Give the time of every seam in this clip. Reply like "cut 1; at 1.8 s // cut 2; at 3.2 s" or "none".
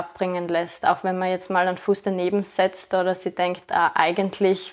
none